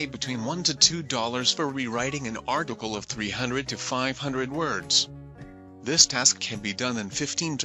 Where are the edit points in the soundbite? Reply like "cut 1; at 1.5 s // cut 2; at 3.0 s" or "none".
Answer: none